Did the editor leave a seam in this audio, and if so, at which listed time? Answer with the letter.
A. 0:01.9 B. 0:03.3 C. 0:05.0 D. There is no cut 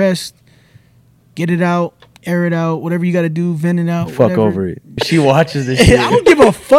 C